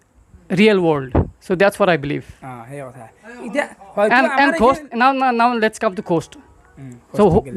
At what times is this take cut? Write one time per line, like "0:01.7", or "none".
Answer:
none